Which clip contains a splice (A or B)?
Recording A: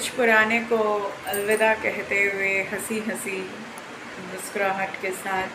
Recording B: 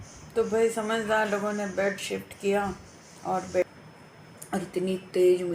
B